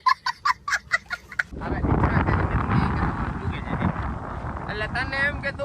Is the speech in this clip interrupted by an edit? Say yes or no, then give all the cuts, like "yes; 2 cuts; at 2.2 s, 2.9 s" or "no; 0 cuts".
yes; 1 cut; at 1.5 s